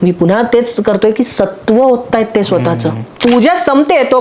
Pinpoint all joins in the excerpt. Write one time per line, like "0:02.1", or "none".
0:03.0